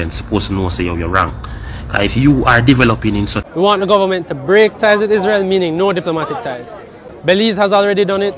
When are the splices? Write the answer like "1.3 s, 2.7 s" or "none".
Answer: 3.4 s